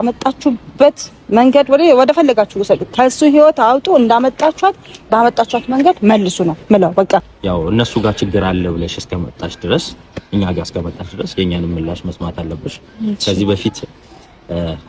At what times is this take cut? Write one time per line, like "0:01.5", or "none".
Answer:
0:07.3